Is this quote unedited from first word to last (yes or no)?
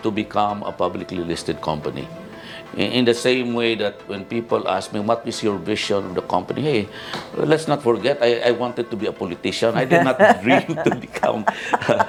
yes